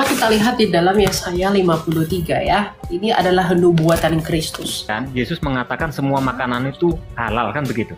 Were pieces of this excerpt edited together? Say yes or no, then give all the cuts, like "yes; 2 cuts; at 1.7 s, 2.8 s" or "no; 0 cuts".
yes; 2 cuts; at 2.8 s, 5.0 s